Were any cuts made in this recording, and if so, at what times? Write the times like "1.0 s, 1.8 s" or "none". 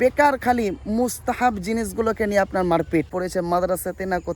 3.1 s